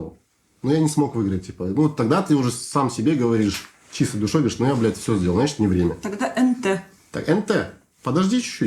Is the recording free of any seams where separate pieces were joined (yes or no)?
yes